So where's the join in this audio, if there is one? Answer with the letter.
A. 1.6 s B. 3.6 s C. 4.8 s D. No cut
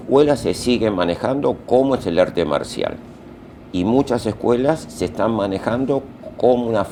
D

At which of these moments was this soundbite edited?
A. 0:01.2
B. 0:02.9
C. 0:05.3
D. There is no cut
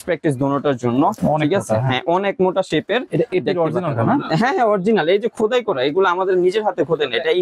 A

